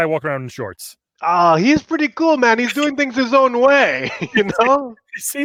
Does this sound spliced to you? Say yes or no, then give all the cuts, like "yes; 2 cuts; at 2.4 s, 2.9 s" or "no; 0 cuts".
no; 0 cuts